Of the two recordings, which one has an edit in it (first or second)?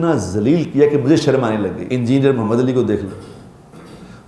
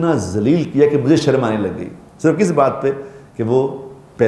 first